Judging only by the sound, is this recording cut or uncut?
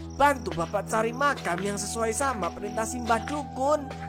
uncut